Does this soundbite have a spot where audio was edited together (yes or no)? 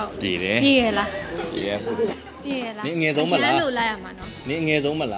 no